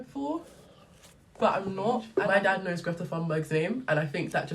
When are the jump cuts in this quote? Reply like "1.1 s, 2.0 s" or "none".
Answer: 2.3 s